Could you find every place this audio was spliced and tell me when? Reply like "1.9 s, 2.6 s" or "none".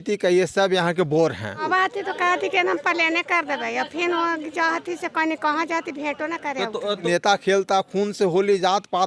1.6 s, 7.0 s